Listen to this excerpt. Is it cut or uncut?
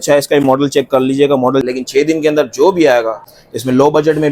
cut